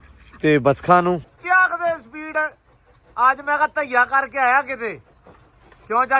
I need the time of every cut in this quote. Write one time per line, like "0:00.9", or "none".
0:01.3